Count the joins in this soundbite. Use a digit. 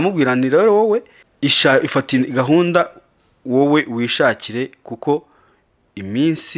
1